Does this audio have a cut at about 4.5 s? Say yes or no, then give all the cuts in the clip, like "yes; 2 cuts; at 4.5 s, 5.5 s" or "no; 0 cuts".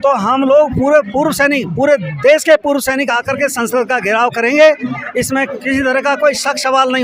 no; 0 cuts